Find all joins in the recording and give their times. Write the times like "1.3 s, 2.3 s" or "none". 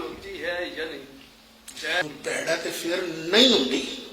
2.0 s